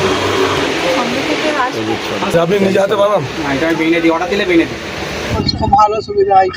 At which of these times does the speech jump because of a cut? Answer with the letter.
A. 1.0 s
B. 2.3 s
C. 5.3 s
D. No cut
C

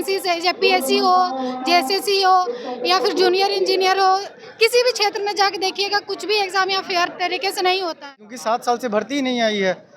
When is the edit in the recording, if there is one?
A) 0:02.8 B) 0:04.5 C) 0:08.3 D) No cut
C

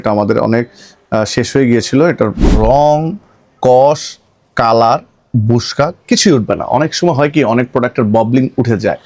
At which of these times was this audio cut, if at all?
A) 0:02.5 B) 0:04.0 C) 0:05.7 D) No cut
A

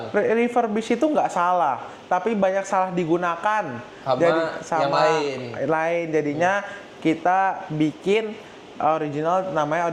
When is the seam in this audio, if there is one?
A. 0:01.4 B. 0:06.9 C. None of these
C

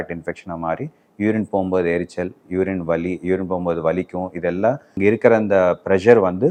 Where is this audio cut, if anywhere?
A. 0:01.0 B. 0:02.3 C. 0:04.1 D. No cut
D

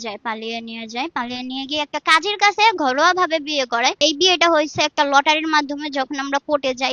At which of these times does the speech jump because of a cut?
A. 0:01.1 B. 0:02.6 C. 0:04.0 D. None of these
C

